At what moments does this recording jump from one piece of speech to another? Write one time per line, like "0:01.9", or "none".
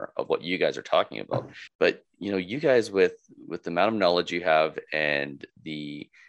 0:01.6